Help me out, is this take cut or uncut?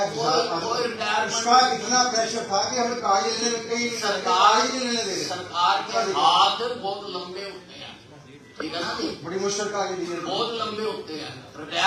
uncut